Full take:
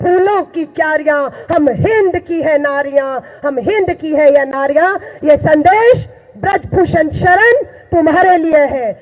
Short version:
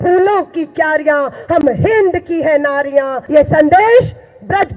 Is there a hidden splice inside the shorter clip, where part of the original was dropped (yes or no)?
yes